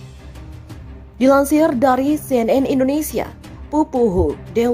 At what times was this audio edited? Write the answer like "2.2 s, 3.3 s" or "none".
1.1 s